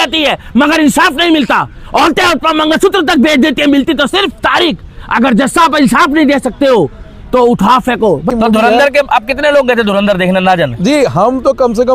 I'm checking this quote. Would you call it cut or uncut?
cut